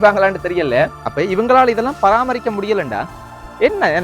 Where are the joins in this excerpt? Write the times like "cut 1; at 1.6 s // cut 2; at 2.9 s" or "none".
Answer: cut 1; at 1.0 s

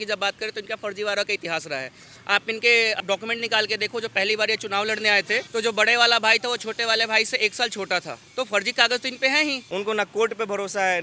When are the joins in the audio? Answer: cut 1; at 3.0 s // cut 2; at 5.5 s // cut 3; at 8.2 s // cut 4; at 9.6 s

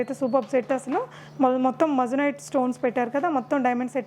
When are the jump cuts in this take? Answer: none

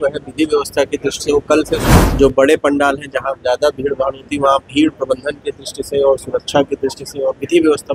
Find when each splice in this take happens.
cut 1; at 2.0 s

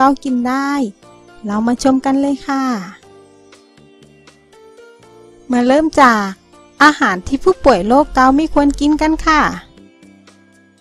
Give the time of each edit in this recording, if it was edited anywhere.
none

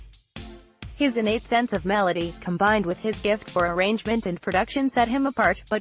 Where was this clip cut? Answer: cut 1; at 0.9 s

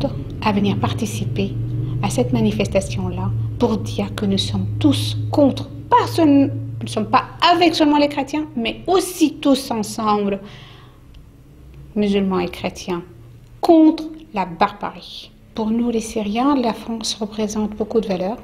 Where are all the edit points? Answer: cut 1; at 15.5 s

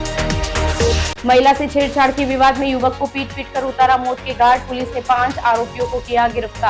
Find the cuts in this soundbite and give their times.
cut 1; at 1.0 s

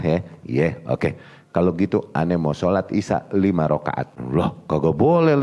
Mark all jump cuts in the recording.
cut 1; at 4.1 s

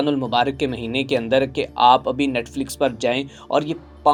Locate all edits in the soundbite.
none

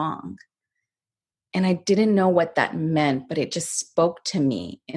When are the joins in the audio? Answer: none

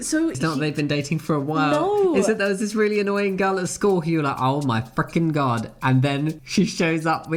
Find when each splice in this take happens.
none

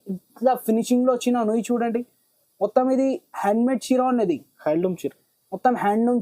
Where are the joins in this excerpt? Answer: none

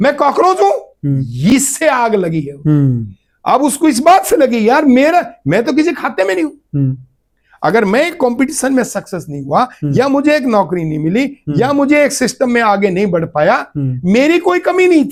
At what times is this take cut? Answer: none

